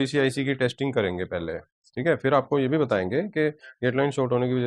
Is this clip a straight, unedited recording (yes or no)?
yes